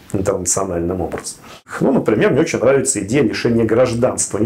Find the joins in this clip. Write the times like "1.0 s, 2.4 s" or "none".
1.6 s

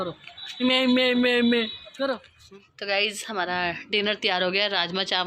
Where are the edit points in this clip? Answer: 2.3 s

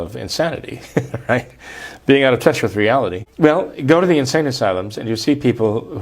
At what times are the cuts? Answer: 3.2 s

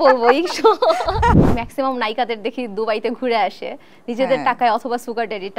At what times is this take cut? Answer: 1.4 s

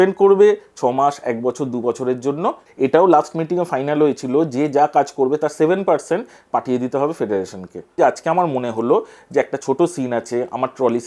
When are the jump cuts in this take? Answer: 2.7 s, 7.9 s

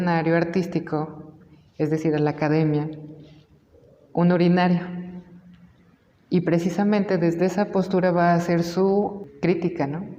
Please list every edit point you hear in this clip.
9.3 s

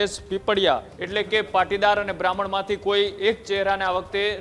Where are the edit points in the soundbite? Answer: 1.0 s

